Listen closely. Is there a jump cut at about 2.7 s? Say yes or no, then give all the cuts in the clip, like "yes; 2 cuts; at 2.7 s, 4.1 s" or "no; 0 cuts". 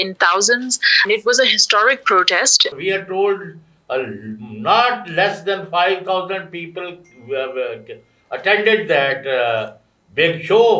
yes; 2 cuts; at 1.0 s, 2.7 s